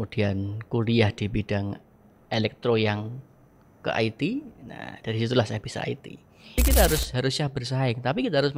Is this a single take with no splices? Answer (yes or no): no